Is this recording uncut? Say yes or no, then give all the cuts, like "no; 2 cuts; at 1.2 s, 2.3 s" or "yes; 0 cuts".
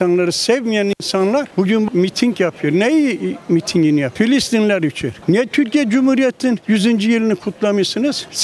yes; 0 cuts